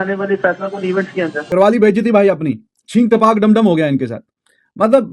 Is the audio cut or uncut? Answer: uncut